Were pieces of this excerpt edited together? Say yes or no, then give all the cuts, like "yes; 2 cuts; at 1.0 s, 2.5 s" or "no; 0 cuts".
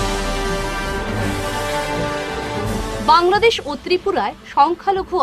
yes; 1 cut; at 2.4 s